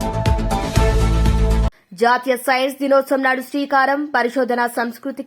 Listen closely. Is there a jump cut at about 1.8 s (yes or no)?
yes